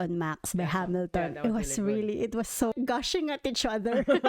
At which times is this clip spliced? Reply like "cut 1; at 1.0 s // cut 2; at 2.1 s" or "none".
cut 1; at 2.7 s